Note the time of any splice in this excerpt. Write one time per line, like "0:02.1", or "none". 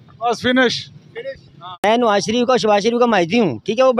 none